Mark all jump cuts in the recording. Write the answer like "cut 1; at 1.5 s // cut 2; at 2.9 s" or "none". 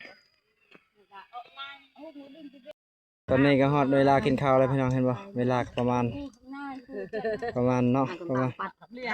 cut 1; at 2.7 s